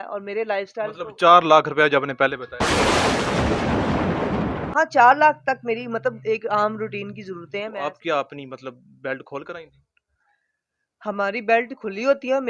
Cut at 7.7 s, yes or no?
yes